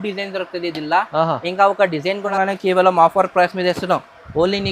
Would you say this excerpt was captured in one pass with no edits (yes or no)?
no